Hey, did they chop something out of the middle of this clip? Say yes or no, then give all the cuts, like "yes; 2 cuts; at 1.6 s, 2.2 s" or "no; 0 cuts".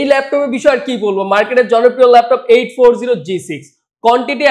no; 0 cuts